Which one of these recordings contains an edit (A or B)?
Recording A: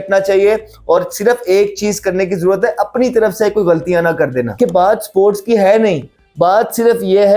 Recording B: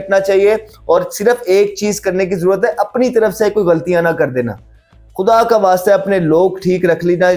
A